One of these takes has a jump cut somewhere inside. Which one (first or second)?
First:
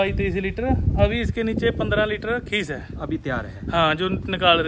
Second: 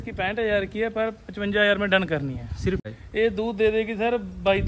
second